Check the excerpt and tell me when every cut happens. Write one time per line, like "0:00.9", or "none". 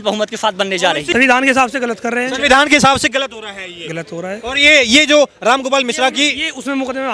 0:01.1